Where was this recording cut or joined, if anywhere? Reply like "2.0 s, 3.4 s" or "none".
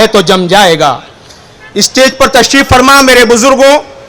none